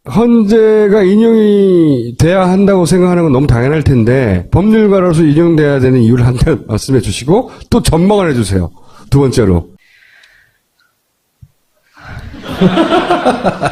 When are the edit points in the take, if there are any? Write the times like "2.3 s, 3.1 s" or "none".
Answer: none